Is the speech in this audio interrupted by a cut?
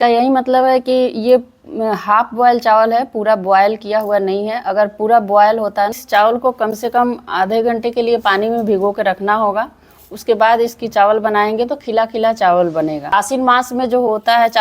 yes; 2 cuts; at 6.0 s, 13.1 s

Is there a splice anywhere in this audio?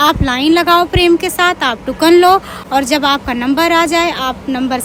no; 0 cuts

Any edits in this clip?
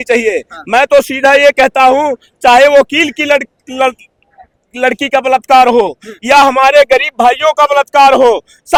no; 0 cuts

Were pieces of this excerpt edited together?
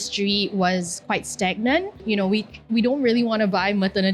yes; 1 cut; at 1.9 s

